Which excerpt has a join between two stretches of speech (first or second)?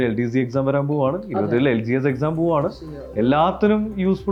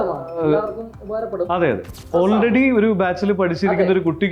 second